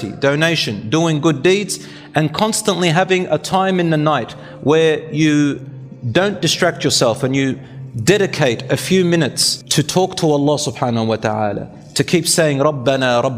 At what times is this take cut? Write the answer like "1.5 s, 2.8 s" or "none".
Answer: none

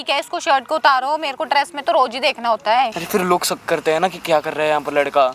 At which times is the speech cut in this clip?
3.0 s

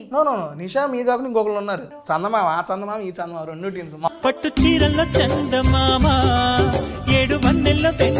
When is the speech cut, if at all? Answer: 1.9 s, 4.1 s

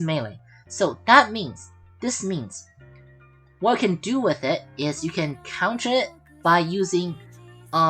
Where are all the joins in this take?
none

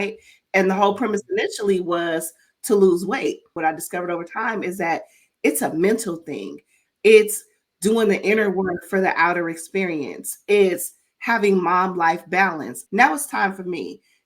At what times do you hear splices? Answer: 3.5 s, 12.8 s

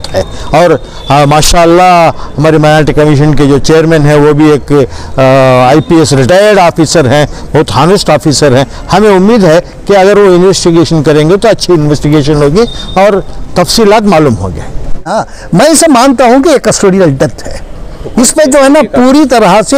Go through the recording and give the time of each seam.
15.2 s

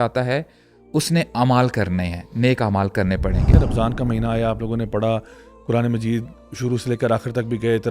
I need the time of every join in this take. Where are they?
3.6 s

